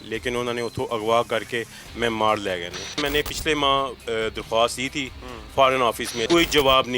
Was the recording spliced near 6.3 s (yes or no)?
yes